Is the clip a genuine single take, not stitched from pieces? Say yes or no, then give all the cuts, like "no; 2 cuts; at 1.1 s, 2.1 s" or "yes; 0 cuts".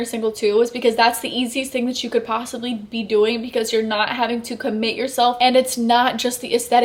no; 1 cut; at 5.4 s